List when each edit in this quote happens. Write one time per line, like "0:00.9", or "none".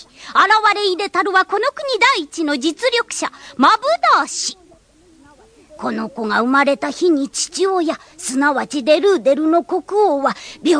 none